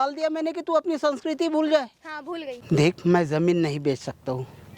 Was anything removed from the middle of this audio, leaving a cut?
yes; 1 cut; at 2.6 s

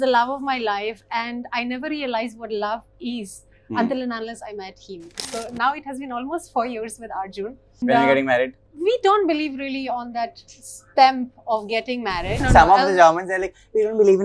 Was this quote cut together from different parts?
yes; 4 cuts; at 5.2 s, 7.8 s, 8.6 s, 12.5 s

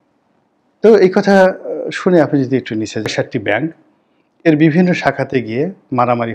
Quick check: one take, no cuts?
no; 1 cut; at 3.1 s

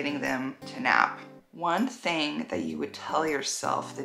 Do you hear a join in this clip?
yes; 1 cut; at 1.3 s

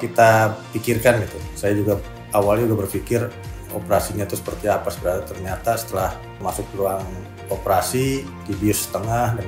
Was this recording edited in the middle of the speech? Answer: no; 0 cuts

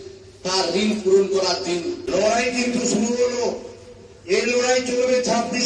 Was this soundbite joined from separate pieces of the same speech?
yes; 1 cut; at 2.0 s

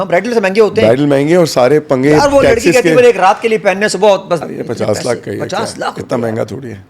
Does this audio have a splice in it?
yes; 1 cut; at 4.4 s

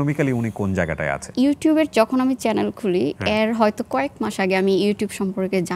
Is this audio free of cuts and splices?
no; 1 cut; at 1.2 s

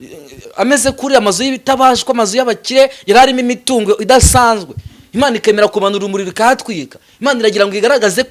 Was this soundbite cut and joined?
no; 0 cuts

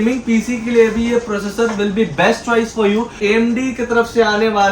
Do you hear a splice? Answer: yes; 1 cut; at 3.1 s

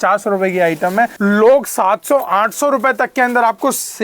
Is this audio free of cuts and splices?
no; 1 cut; at 1.1 s

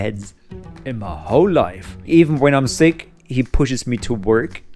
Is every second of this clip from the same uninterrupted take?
no; 1 cut; at 1.9 s

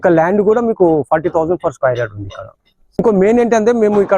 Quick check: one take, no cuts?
no; 1 cut; at 3.0 s

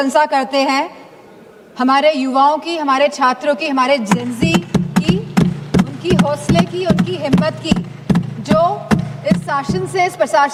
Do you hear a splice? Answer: no; 0 cuts

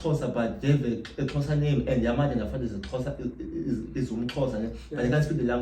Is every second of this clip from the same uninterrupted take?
yes; 0 cuts

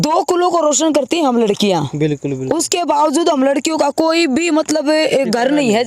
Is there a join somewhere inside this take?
no; 0 cuts

